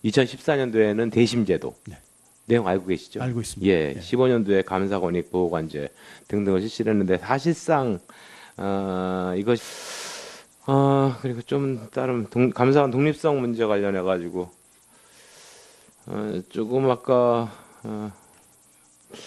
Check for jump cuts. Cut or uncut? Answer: uncut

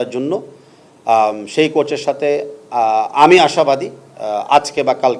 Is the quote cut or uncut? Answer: uncut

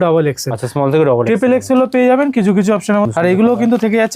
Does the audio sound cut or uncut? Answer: cut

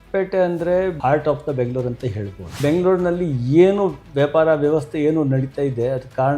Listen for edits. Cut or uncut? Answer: cut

